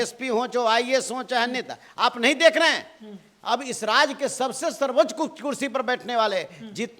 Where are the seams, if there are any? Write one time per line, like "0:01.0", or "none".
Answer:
none